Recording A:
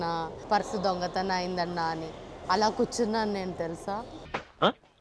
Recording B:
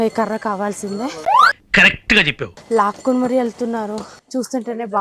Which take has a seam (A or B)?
B